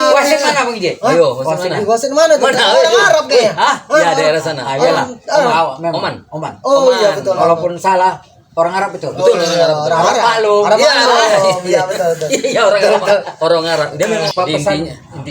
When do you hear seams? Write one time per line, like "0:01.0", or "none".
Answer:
0:14.3